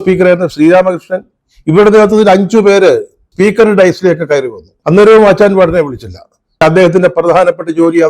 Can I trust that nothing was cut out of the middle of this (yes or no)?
no